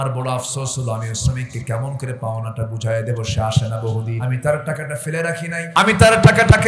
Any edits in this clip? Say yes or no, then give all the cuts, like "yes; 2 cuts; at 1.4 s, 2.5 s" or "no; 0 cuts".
yes; 2 cuts; at 4.1 s, 5.7 s